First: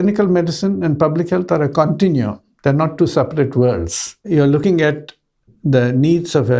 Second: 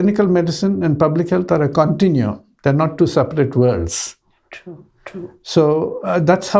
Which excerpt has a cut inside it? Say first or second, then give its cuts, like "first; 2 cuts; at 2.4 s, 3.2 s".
first; 1 cut; at 4.6 s